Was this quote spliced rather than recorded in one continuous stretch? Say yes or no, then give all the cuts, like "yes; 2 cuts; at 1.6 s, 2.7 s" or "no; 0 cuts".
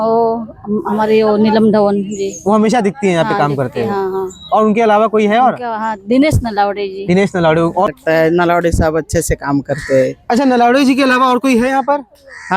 yes; 1 cut; at 7.9 s